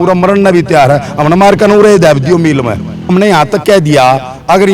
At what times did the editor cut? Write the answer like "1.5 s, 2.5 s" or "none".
3.1 s